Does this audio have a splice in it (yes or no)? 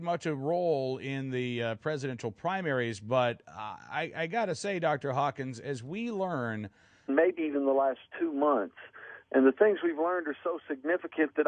no